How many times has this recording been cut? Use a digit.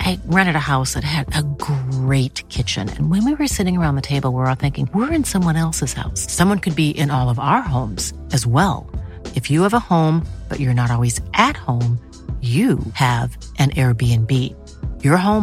0